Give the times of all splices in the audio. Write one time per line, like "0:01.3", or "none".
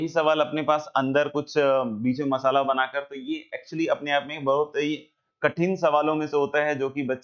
none

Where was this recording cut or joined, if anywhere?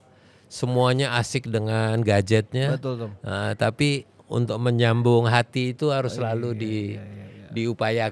none

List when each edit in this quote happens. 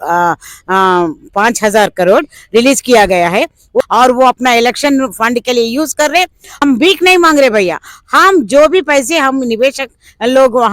0:03.8
0:06.6

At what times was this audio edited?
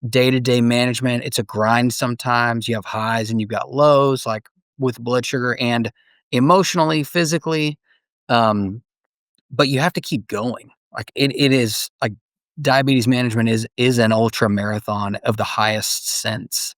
none

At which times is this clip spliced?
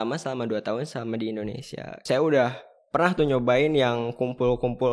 0:02.0

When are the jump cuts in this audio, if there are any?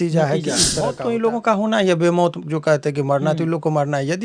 0:01.1

